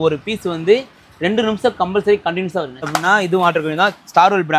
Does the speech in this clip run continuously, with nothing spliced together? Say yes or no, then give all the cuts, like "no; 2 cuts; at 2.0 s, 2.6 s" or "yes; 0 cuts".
no; 1 cut; at 2.9 s